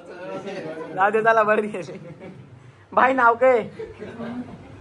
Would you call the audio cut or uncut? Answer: uncut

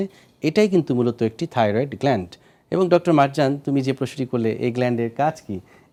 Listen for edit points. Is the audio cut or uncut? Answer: uncut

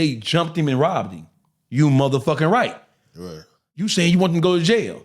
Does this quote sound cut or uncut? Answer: cut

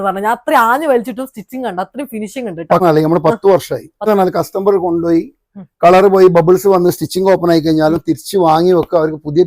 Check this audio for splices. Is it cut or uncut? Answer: cut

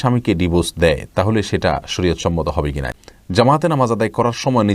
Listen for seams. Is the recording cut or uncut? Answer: cut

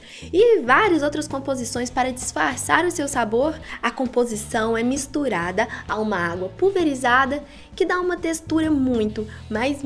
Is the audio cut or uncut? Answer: uncut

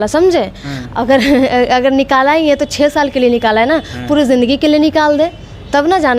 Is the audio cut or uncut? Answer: uncut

